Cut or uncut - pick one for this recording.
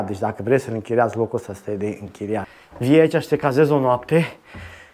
cut